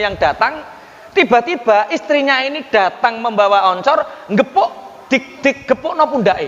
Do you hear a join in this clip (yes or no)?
no